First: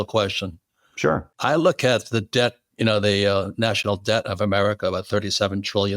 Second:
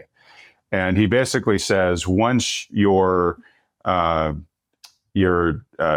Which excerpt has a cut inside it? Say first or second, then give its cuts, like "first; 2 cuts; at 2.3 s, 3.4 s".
first; 1 cut; at 0.9 s